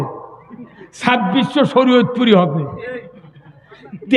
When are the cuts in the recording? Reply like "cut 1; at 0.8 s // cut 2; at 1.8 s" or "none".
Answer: none

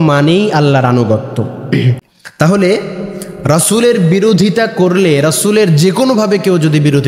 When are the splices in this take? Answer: cut 1; at 2.0 s

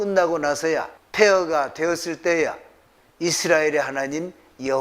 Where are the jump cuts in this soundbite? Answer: cut 1; at 1.0 s

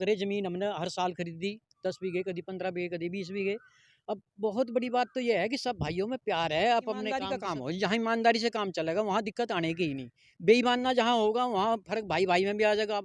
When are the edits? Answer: cut 1; at 7.3 s

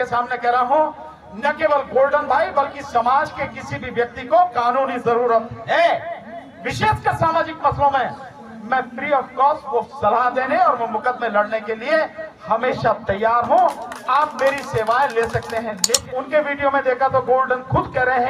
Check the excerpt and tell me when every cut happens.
cut 1; at 15.8 s

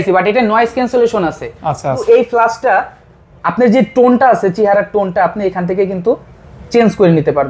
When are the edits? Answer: cut 1; at 2.0 s

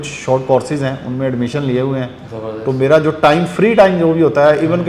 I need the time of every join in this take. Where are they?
none

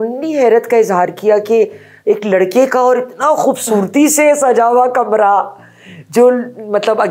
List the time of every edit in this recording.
none

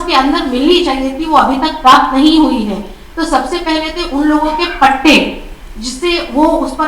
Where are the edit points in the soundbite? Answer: none

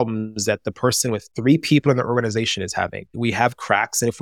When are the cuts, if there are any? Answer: cut 1; at 1.3 s // cut 2; at 3.2 s

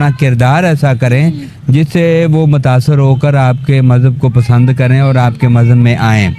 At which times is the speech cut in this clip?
none

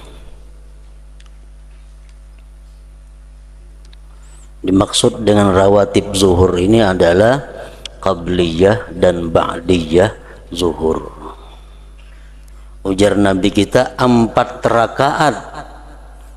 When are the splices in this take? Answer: cut 1; at 12.5 s

